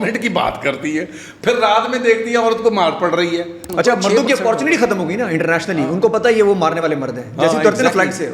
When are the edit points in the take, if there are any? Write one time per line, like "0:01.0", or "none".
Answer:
0:03.6